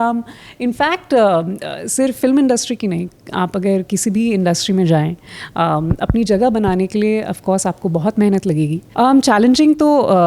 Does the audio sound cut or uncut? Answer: cut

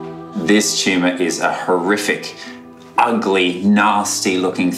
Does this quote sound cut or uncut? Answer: uncut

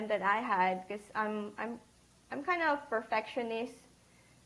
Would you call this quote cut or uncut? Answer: uncut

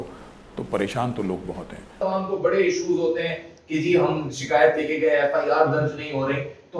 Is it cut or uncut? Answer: cut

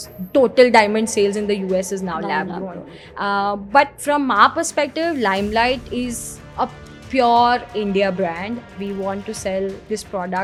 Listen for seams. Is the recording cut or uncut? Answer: uncut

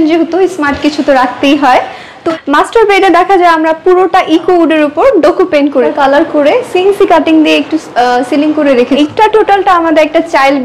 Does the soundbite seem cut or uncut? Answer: cut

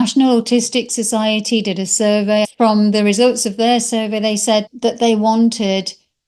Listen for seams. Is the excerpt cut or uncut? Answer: cut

